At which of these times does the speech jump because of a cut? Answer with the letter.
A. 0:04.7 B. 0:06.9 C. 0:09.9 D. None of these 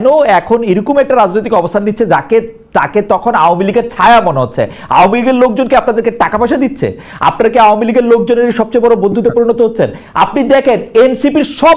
D